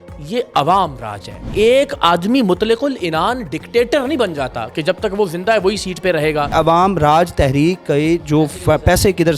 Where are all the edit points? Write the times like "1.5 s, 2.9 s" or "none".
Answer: 1.5 s, 6.5 s